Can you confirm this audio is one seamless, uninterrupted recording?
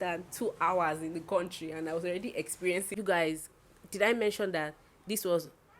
no; 1 cut; at 2.9 s

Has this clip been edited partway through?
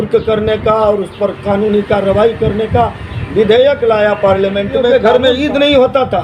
yes; 1 cut; at 4.9 s

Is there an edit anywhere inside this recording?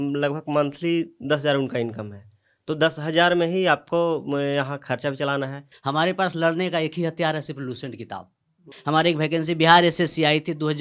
yes; 2 cuts; at 5.7 s, 8.7 s

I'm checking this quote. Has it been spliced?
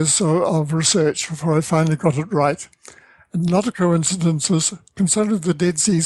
no; 0 cuts

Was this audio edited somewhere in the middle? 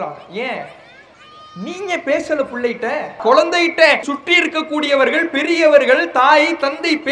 yes; 2 cuts; at 3.2 s, 4.1 s

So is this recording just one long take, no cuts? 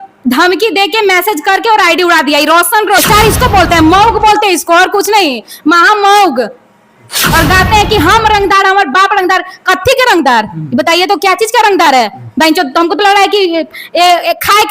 no; 2 cuts; at 3.0 s, 7.2 s

